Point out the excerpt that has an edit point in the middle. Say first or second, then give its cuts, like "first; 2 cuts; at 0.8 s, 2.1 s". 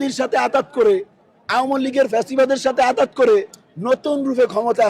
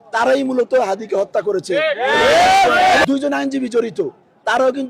second; 1 cut; at 3.0 s